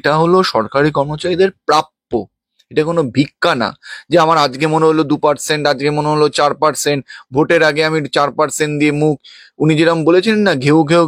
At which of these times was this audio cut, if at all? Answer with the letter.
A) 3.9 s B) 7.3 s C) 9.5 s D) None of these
D